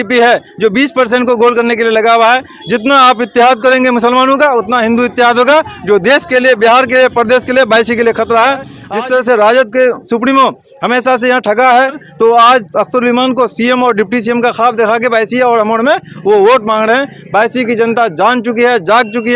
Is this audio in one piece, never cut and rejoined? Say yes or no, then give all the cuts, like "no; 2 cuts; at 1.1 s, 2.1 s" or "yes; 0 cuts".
no; 1 cut; at 8.8 s